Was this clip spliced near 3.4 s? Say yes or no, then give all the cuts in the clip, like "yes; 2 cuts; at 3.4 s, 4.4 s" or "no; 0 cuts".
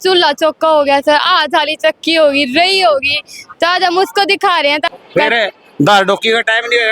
no; 1 cut; at 4.8 s